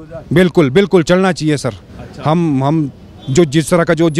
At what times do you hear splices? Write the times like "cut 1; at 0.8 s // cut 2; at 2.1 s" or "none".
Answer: none